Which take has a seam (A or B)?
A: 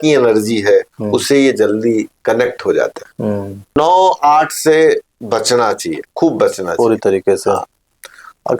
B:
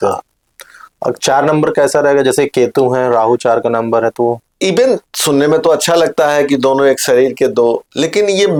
A